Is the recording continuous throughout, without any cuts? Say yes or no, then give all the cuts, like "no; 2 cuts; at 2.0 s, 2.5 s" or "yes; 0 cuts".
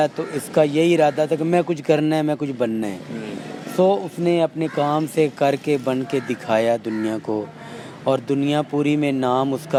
yes; 0 cuts